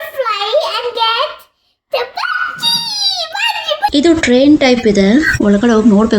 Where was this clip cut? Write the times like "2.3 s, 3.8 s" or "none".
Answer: 3.9 s